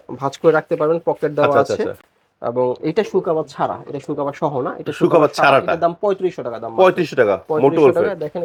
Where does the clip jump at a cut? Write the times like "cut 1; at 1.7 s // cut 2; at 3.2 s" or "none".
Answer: none